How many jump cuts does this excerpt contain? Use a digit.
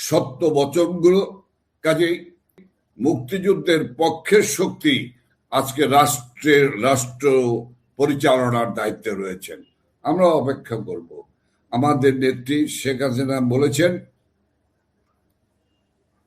1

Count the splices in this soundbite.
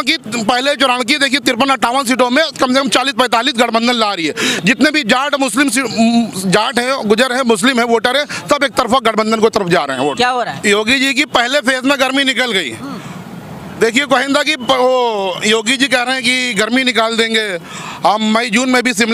1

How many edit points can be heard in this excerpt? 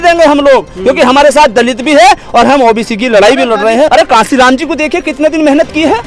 1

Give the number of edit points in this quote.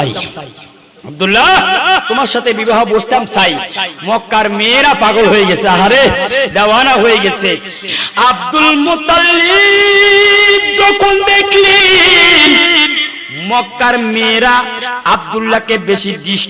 1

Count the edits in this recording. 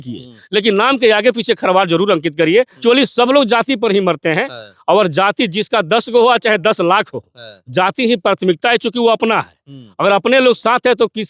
1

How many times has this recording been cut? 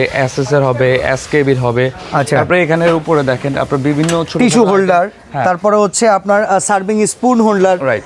0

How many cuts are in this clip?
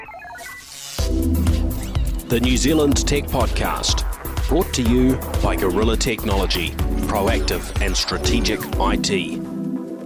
0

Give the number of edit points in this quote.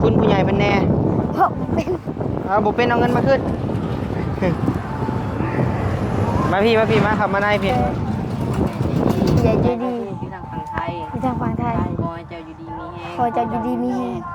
1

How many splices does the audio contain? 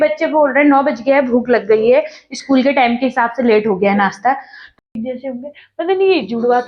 1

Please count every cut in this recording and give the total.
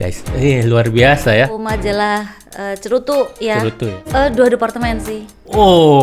2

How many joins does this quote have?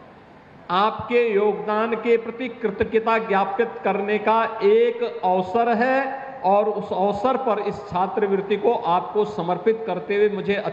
0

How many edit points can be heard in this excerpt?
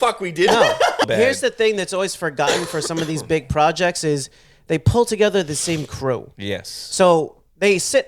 1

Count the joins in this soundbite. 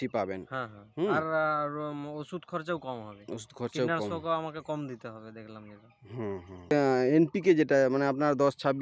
1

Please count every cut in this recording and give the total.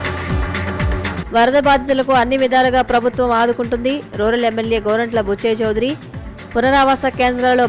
1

